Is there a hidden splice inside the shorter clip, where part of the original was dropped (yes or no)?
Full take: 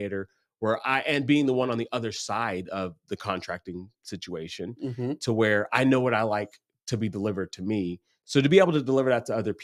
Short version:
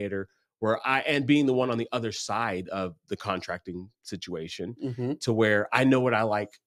no